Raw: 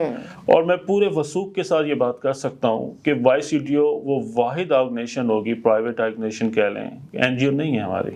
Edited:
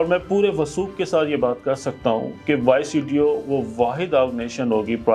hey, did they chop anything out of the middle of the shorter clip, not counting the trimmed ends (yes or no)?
no